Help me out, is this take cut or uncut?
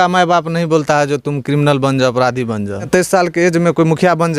cut